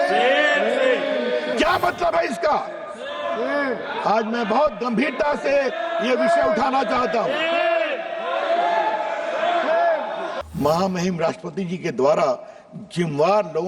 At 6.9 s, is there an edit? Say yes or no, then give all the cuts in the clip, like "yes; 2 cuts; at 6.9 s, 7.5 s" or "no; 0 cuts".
no; 2 cuts; at 1.5 s, 10.3 s